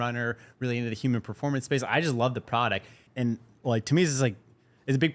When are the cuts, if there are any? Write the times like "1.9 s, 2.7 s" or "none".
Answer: 3.1 s